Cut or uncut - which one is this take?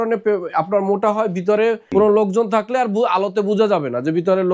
cut